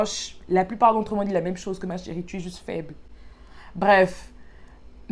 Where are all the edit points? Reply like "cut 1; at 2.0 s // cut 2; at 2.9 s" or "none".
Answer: none